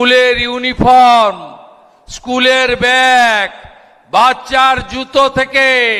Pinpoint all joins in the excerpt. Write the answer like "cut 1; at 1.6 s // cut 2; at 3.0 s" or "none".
none